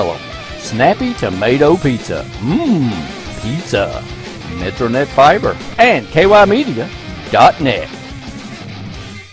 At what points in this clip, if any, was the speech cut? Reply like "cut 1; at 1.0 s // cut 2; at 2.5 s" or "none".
cut 1; at 5.6 s